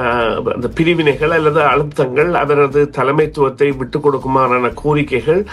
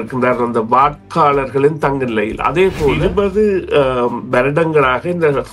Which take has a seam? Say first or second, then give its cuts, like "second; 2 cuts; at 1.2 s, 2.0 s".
second; 1 cut; at 3.0 s